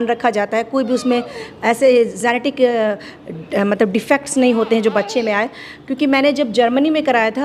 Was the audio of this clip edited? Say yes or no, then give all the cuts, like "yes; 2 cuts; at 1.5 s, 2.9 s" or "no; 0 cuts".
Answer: no; 0 cuts